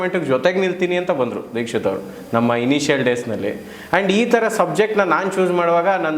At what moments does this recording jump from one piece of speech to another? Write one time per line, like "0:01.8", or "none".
none